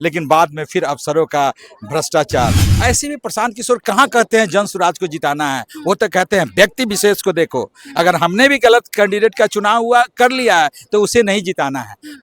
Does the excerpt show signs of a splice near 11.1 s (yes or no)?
no